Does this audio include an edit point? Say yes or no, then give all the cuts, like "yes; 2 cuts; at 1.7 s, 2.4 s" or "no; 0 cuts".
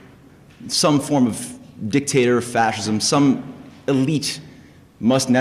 yes; 1 cut; at 2.5 s